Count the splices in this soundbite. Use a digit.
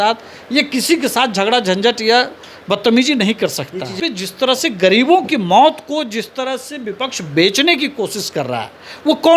1